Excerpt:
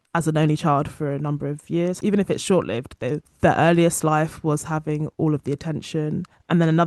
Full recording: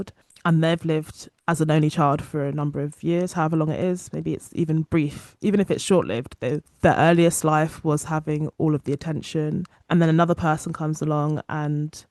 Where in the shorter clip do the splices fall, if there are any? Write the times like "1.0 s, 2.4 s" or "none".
2.0 s